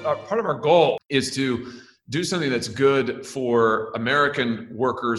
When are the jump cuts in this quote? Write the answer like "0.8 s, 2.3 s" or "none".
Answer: 1.0 s